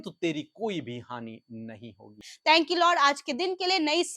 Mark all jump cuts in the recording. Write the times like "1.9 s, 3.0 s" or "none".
2.3 s